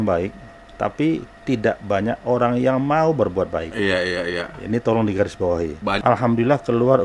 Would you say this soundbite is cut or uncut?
cut